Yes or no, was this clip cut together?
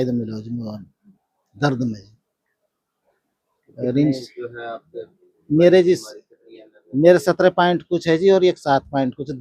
no